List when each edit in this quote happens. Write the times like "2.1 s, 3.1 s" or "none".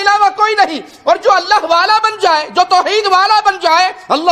none